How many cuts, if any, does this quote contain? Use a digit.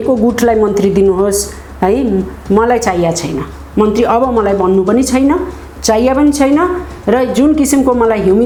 0